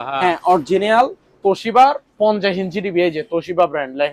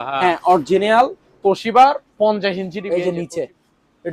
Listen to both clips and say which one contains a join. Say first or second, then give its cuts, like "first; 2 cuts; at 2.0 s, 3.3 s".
second; 1 cut; at 2.8 s